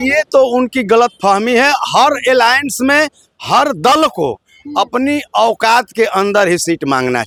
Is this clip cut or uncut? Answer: uncut